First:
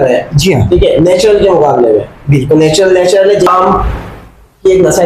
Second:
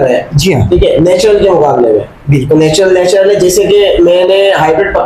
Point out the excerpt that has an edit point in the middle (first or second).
first